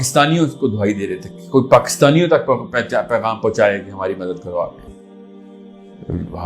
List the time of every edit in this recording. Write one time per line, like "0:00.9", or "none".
0:04.8